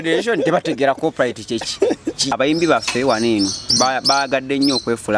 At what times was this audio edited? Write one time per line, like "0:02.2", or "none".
0:02.3